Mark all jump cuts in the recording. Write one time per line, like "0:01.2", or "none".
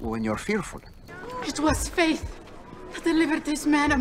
0:01.1